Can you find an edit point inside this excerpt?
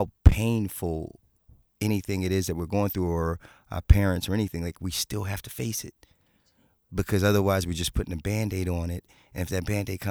no; 0 cuts

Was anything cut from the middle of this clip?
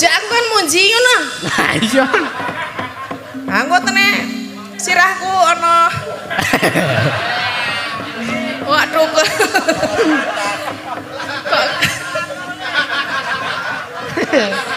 no; 0 cuts

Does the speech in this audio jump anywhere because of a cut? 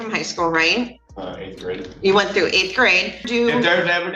yes; 1 cut; at 3.2 s

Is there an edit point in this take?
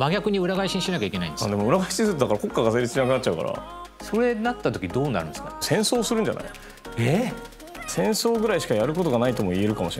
yes; 3 cuts; at 3.8 s, 5.6 s, 7.9 s

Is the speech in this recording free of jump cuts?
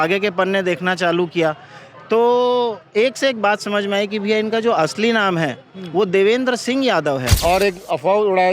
no; 1 cut; at 7.4 s

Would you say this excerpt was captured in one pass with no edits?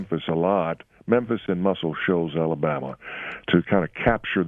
yes; 0 cuts

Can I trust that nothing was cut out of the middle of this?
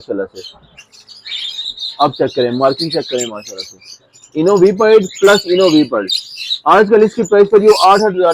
yes; 0 cuts

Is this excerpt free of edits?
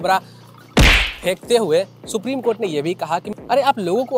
no; 1 cut; at 3.3 s

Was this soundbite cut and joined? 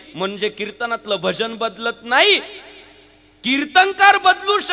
no; 0 cuts

